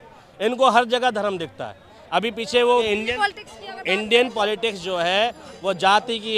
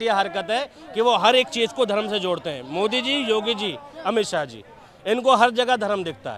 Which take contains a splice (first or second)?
first